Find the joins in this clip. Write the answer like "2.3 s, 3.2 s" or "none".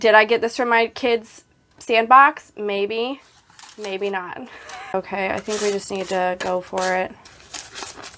4.9 s